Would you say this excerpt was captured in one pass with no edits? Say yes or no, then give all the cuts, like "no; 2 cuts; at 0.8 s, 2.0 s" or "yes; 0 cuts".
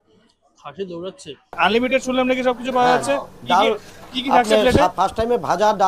no; 1 cut; at 1.6 s